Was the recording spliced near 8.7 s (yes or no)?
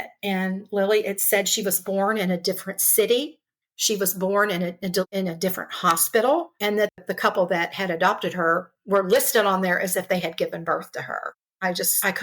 no